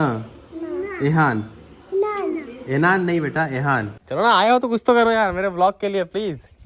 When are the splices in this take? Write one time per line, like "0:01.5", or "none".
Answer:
0:04.0